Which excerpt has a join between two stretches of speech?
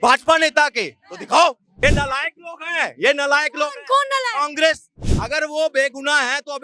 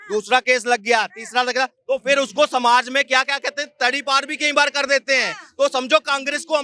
first; 2 cuts; at 1.8 s, 5.0 s

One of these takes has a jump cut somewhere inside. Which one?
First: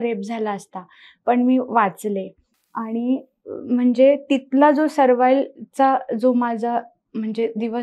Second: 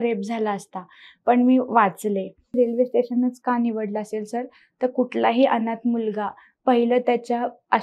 second; 1 cut; at 2.6 s

